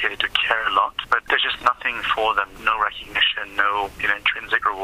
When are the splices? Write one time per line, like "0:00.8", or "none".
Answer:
0:01.2
0:02.5
0:04.0